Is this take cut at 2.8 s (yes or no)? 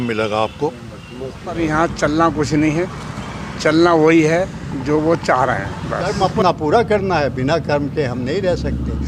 no